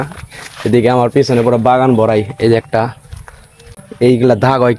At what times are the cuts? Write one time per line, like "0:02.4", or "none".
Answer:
0:03.7